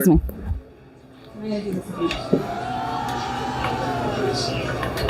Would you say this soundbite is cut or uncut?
uncut